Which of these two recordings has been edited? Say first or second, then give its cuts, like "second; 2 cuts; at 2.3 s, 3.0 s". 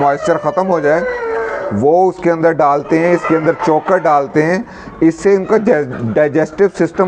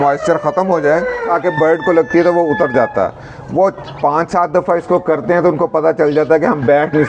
second; 1 cut; at 1.3 s